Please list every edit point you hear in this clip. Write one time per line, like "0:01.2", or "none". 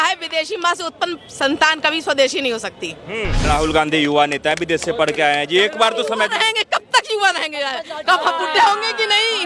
0:01.2
0:03.4

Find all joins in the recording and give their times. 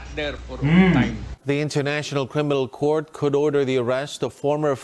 0:01.3

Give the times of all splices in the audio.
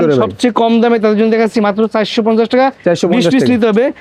none

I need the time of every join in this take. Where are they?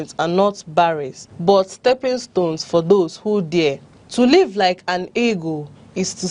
none

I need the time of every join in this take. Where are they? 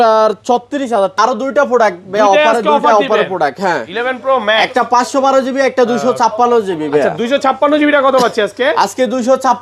0:01.2

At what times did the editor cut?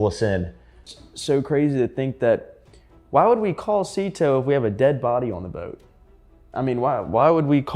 0:00.9

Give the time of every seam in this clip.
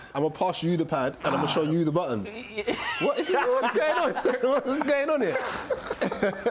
none

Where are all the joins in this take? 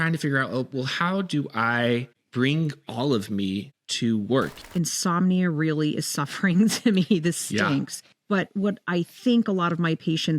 0:04.5

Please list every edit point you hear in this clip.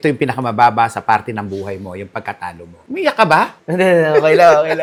none

